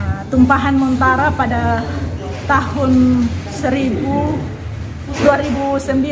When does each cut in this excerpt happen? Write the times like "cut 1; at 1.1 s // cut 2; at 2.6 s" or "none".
none